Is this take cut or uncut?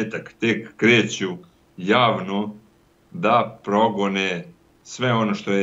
uncut